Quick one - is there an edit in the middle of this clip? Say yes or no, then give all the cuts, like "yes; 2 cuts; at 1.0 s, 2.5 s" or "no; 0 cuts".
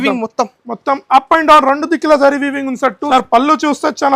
yes; 1 cut; at 3.0 s